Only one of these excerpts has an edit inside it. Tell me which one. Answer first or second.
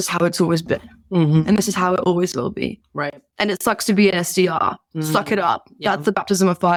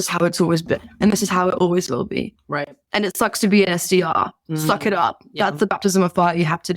second